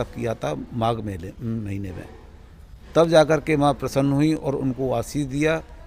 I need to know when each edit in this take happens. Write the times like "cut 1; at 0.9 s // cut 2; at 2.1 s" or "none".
none